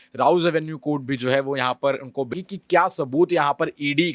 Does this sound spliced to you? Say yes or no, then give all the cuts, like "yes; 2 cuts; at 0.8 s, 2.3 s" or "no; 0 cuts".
yes; 1 cut; at 2.3 s